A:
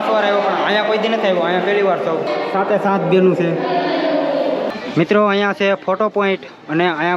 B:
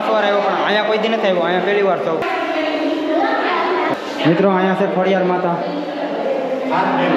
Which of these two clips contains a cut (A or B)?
A